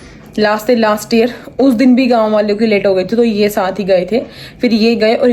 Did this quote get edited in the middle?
no; 0 cuts

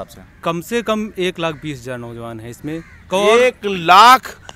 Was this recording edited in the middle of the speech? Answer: no; 0 cuts

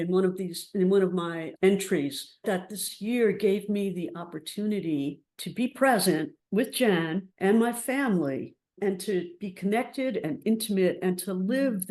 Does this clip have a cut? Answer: yes; 2 cuts; at 1.5 s, 2.4 s

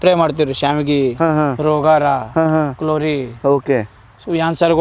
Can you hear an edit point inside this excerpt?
no; 0 cuts

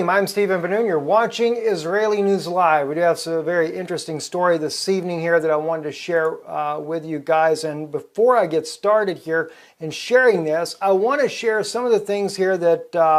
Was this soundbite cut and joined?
yes; 1 cut; at 6.5 s

